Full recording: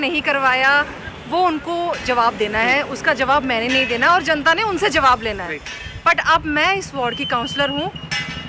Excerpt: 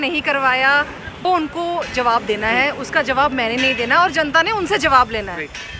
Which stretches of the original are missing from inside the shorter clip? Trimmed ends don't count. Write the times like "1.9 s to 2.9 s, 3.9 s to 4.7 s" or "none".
1.2 s to 1.3 s